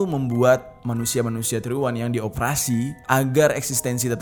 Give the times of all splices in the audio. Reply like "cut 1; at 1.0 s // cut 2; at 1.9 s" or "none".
none